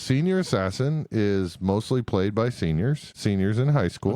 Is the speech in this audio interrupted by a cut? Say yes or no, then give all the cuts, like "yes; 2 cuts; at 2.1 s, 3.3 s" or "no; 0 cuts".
yes; 1 cut; at 3.1 s